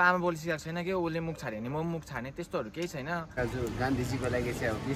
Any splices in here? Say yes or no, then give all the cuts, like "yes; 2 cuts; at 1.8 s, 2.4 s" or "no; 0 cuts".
yes; 1 cut; at 3.4 s